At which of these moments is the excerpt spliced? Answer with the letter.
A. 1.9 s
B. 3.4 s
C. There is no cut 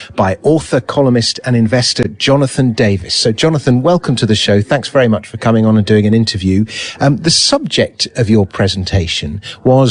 A